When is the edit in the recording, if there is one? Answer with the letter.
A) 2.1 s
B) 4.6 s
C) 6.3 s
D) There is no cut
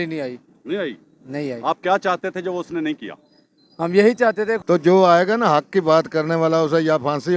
B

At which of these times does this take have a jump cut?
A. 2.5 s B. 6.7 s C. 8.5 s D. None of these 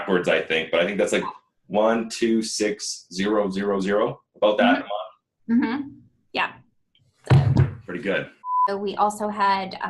C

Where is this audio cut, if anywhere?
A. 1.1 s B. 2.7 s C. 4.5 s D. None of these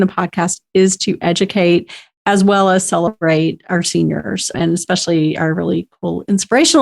C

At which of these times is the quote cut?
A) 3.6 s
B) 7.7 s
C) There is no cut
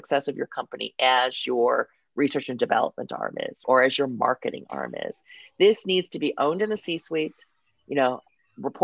A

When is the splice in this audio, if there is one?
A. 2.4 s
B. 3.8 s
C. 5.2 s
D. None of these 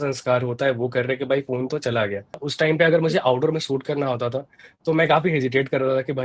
A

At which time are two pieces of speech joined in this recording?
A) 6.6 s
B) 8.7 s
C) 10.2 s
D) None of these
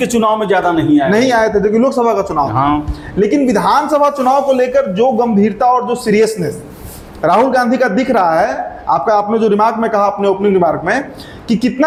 D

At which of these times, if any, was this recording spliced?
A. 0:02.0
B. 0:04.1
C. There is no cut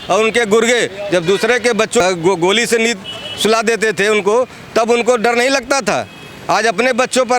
A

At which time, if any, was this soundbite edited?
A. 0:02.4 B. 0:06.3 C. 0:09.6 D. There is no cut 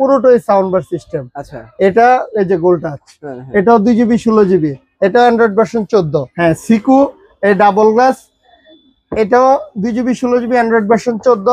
B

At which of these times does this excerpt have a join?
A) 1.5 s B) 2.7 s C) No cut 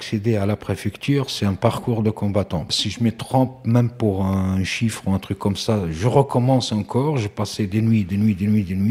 B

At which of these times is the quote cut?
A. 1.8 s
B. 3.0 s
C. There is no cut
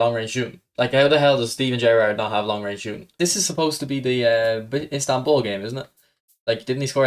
C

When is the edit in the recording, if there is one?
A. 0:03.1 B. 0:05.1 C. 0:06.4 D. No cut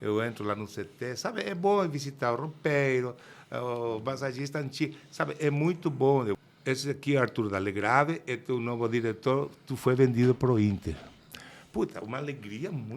C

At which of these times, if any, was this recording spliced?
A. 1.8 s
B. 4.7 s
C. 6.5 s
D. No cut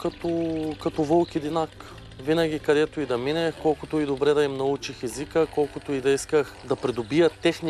C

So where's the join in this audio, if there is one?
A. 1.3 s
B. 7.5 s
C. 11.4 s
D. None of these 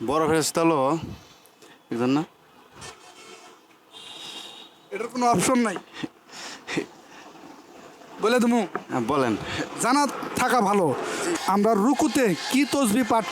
C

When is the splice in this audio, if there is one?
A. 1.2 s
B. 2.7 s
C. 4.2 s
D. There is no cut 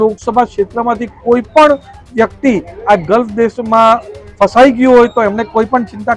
D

